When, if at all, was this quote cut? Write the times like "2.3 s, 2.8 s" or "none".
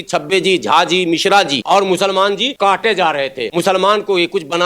1.6 s, 2.5 s, 3.4 s